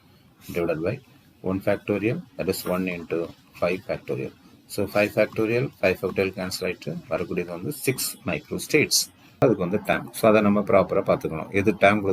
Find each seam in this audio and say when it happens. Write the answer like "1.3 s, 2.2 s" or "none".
9.4 s